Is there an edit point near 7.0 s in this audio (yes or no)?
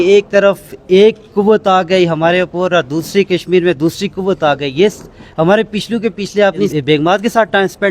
yes